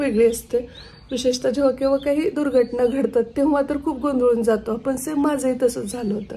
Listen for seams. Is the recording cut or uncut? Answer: uncut